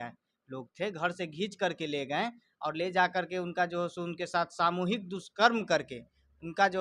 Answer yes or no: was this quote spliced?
no